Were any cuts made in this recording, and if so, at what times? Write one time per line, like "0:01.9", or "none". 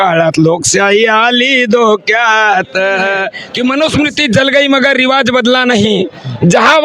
0:03.4